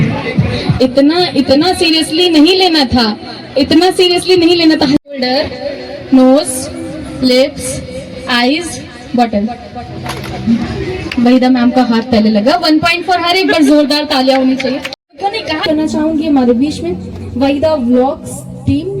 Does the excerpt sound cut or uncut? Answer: cut